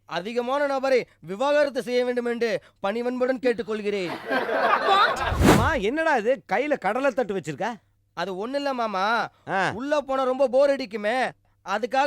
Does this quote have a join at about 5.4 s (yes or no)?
yes